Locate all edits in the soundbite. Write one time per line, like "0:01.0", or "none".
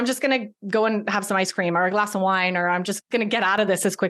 0:02.9